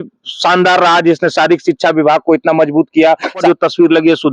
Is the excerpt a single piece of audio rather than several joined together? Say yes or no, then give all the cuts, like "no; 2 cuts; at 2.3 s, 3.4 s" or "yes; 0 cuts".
no; 1 cut; at 3.4 s